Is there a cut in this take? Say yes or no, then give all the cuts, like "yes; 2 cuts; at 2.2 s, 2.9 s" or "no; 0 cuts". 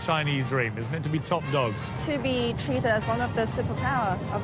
yes; 1 cut; at 1.9 s